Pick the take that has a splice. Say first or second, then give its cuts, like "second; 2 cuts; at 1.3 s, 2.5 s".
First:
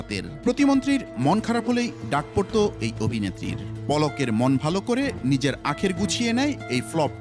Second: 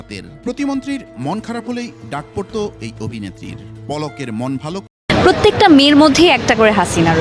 second; 1 cut; at 4.8 s